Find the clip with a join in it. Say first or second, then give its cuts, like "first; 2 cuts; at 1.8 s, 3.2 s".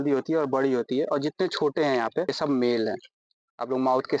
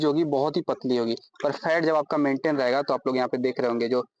first; 1 cut; at 2.3 s